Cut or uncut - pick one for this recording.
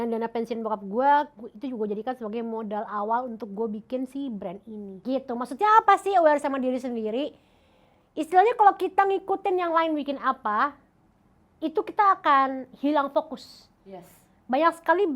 cut